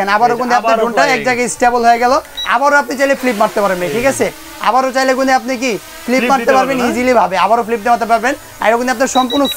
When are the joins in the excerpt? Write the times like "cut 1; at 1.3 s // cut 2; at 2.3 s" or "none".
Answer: none